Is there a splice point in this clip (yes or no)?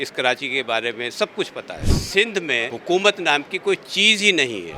yes